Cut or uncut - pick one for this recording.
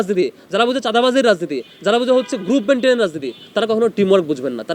uncut